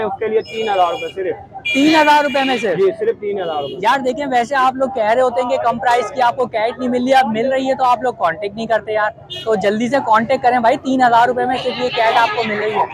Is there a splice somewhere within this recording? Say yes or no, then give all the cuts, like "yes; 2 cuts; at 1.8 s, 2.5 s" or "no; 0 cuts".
no; 0 cuts